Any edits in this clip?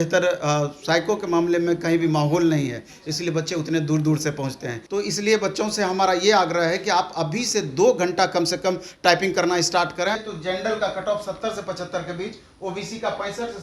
yes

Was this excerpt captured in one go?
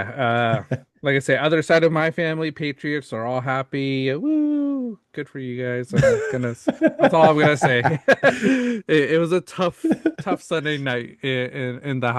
yes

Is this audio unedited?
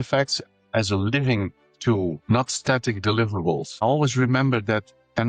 no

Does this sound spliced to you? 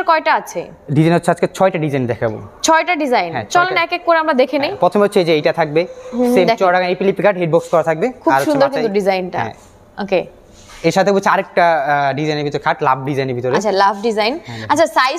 no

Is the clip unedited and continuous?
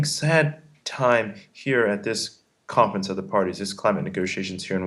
yes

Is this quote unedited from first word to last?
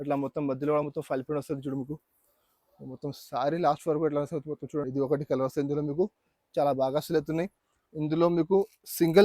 no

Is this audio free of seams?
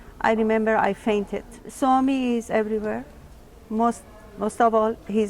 no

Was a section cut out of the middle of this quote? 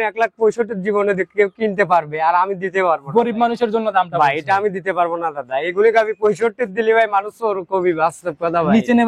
no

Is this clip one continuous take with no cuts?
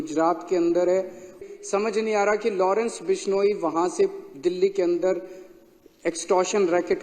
no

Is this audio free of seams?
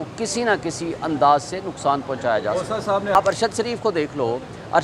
no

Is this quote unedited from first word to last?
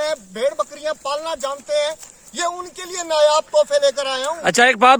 yes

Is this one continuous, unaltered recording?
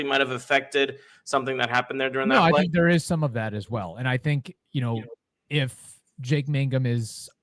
yes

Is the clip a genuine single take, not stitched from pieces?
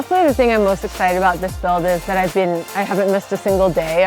no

